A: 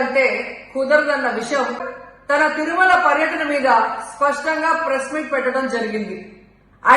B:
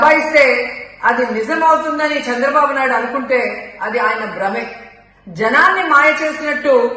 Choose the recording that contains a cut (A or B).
A